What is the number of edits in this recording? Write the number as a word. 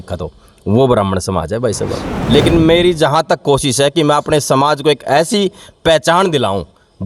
one